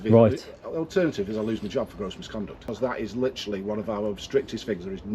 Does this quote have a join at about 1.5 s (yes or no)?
no